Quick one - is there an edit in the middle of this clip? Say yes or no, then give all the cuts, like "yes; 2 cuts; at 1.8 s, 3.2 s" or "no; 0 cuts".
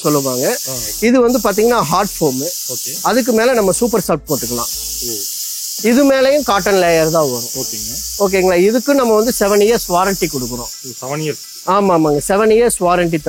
no; 0 cuts